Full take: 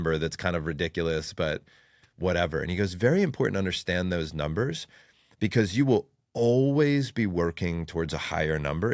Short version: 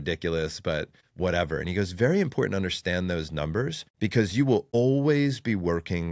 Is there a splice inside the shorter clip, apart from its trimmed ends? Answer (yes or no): yes